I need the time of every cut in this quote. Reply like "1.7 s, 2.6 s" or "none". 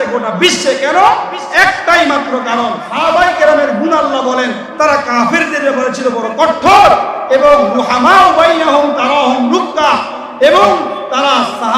2.9 s